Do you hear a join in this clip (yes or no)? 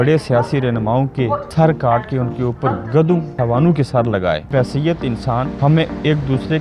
yes